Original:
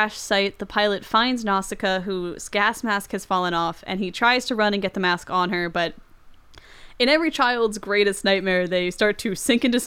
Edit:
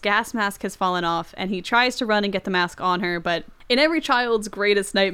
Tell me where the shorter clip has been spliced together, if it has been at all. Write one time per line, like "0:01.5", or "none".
0:03.5